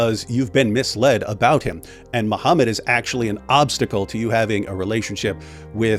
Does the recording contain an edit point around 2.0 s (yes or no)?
no